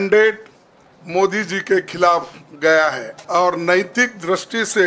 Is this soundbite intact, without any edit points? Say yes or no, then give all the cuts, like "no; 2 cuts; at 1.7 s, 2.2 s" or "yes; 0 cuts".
no; 1 cut; at 3.1 s